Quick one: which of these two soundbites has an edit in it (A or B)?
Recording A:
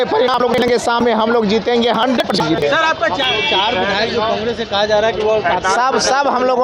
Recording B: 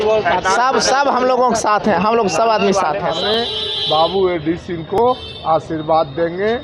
B